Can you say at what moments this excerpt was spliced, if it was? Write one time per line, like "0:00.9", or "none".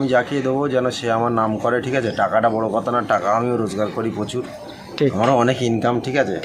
none